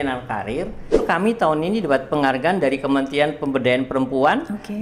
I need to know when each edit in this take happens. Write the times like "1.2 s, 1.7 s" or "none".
1.0 s